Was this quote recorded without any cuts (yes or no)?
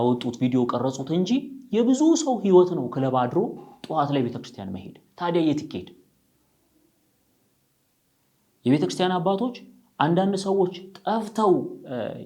yes